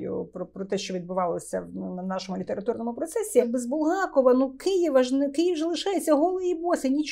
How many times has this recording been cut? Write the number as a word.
one